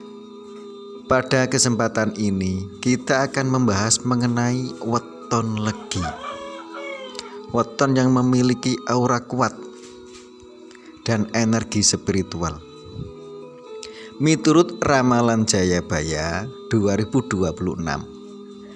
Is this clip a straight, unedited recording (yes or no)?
no